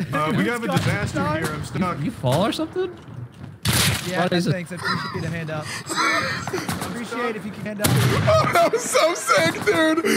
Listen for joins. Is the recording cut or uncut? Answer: cut